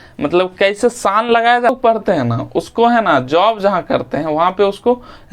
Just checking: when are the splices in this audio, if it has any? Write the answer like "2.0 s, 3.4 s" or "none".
1.7 s